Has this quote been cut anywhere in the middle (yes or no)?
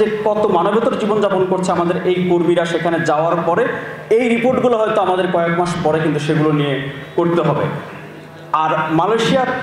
no